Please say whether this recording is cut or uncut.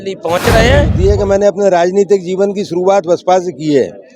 cut